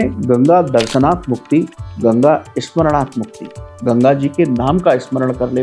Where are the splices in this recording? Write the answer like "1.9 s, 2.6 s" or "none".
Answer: none